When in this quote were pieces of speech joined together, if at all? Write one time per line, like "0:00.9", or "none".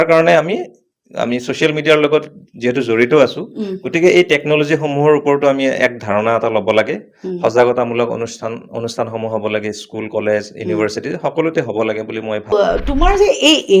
0:12.5